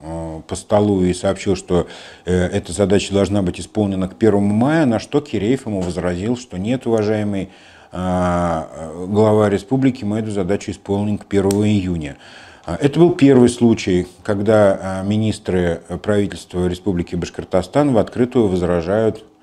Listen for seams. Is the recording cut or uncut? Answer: uncut